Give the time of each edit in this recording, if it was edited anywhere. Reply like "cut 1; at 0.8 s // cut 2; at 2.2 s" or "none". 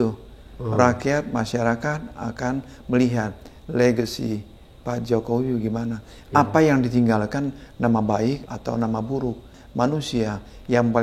cut 1; at 8.5 s // cut 2; at 9.6 s